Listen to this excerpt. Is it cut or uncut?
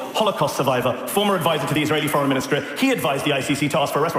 uncut